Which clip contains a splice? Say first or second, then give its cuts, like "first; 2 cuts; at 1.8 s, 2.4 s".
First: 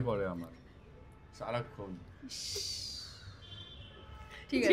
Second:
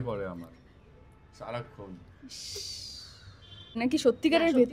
second; 1 cut; at 3.8 s